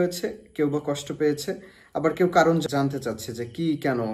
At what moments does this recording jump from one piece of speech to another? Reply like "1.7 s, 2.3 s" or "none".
2.6 s